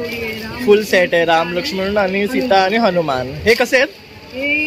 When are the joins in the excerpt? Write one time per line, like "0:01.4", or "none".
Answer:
none